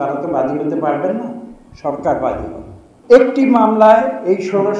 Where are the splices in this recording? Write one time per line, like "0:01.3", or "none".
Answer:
0:02.9